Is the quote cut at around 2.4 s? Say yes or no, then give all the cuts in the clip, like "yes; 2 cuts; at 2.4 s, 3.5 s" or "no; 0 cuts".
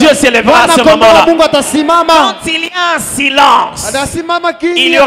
no; 0 cuts